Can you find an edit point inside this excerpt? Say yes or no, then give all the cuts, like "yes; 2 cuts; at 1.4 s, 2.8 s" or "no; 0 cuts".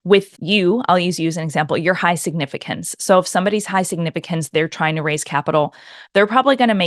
no; 0 cuts